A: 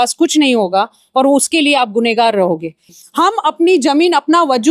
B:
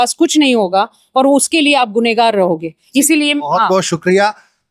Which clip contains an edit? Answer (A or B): A